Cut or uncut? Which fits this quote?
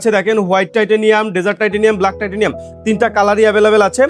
uncut